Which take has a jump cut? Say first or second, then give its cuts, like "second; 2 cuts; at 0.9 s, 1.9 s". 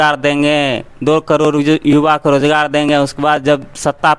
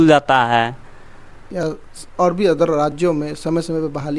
second; 1 cut; at 1.4 s